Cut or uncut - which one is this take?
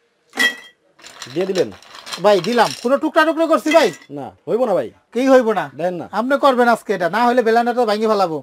cut